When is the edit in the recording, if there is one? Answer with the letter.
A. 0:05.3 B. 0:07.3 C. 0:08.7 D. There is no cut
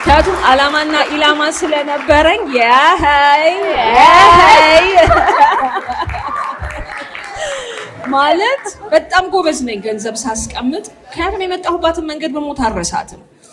D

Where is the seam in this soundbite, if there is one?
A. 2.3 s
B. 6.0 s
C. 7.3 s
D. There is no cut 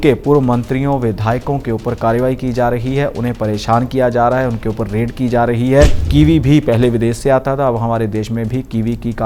B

